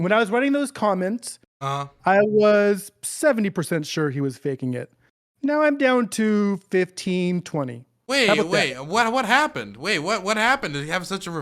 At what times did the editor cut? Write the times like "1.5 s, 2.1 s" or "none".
none